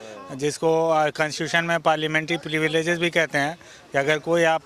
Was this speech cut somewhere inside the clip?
no; 0 cuts

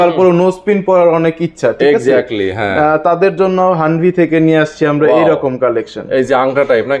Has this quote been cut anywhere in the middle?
no; 0 cuts

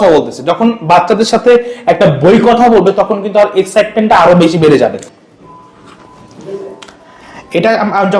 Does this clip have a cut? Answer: yes; 1 cut; at 5.0 s

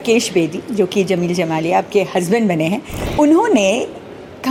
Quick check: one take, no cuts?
yes; 0 cuts

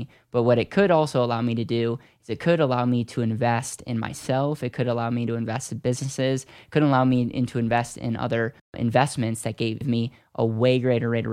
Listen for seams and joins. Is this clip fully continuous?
no; 2 cuts; at 8.8 s, 9.8 s

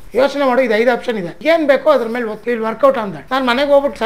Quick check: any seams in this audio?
yes; 3 cuts; at 1.3 s, 2.4 s, 3.2 s

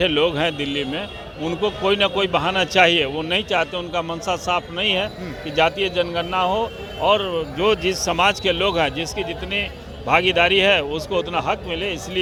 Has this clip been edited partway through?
no; 0 cuts

